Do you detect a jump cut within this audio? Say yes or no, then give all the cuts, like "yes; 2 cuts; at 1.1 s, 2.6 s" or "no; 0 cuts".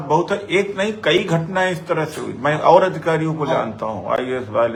no; 0 cuts